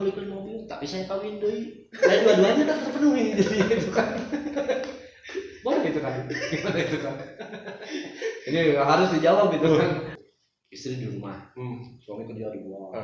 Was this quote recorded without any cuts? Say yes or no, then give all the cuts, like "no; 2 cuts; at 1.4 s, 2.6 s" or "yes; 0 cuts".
no; 1 cut; at 10.1 s